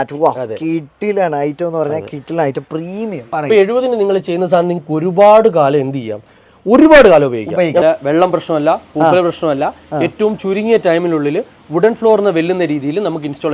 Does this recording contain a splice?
yes; 2 cuts; at 3.3 s, 7.8 s

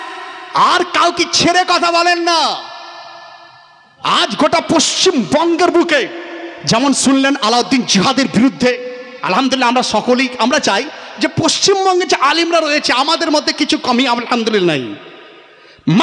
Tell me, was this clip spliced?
no; 0 cuts

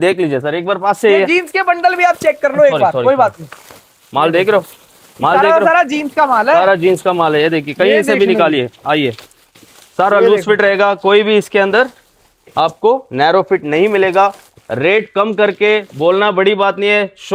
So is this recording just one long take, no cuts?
yes; 0 cuts

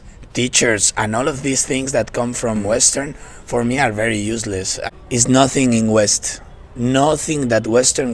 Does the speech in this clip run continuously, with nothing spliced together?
no; 2 cuts; at 2.6 s, 4.6 s

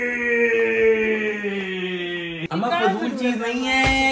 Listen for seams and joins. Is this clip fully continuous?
yes; 0 cuts

